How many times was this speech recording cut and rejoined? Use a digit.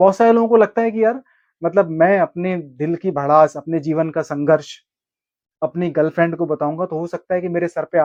0